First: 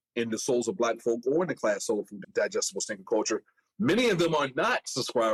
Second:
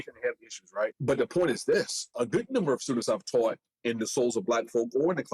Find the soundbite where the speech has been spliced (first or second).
second